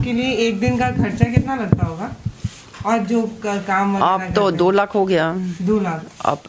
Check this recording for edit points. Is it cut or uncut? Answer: uncut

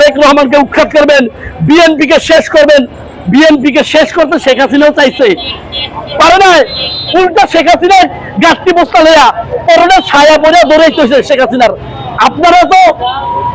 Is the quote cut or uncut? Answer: uncut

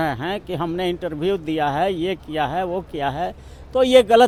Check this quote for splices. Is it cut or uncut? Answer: uncut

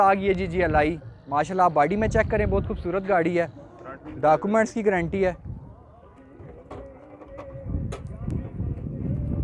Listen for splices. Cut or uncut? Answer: uncut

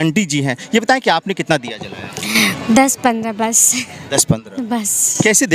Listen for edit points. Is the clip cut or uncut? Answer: uncut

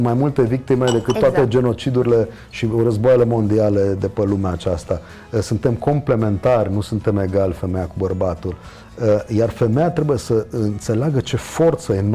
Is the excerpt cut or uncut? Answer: uncut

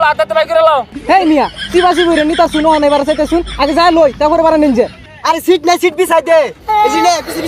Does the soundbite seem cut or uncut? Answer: cut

